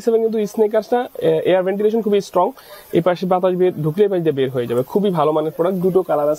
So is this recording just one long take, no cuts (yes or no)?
yes